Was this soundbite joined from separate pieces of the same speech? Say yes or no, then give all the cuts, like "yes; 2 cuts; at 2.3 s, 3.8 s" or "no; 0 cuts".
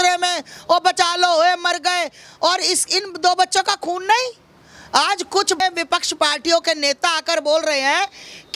yes; 1 cut; at 2.2 s